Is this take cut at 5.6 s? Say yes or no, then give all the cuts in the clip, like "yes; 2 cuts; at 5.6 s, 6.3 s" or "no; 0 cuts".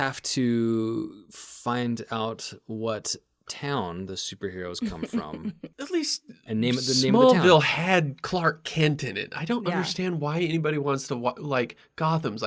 yes; 1 cut; at 5.6 s